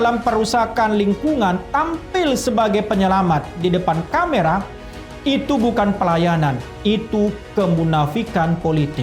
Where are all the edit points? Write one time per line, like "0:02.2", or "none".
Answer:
none